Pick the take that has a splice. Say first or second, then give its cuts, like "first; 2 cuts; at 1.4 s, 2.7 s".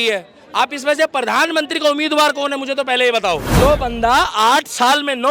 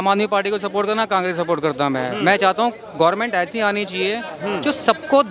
first; 1 cut; at 3.5 s